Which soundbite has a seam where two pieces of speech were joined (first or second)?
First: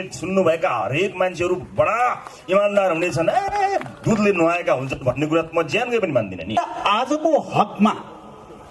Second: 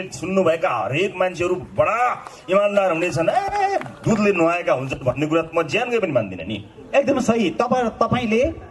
first